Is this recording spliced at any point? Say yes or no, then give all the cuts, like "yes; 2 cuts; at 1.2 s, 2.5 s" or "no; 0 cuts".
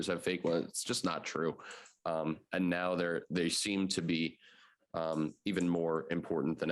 no; 0 cuts